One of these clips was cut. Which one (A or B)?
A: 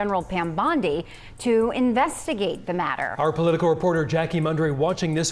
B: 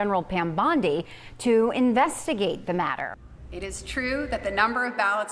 B